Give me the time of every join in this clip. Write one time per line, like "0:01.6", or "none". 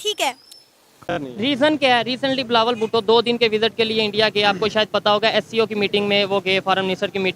0:00.9